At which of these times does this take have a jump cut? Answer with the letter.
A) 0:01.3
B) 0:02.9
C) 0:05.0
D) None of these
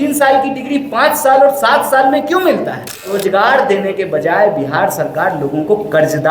B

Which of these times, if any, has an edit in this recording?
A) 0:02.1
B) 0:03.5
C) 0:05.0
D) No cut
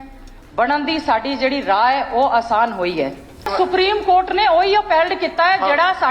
B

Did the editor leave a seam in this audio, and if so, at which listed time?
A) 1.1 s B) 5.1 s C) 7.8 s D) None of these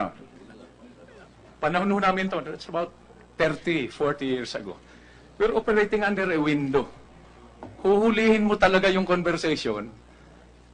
A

